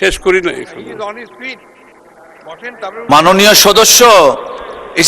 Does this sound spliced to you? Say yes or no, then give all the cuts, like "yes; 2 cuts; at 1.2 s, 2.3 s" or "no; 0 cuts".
no; 0 cuts